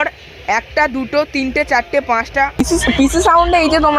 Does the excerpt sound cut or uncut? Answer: cut